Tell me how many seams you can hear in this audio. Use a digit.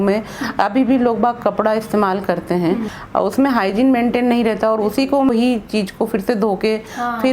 2